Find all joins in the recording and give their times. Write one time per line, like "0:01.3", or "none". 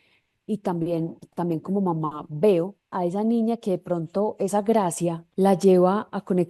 0:02.9
0:05.2